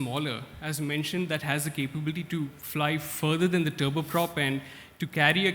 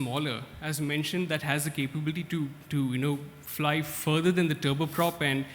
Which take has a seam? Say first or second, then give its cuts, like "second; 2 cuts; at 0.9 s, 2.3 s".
first; 1 cut; at 2.6 s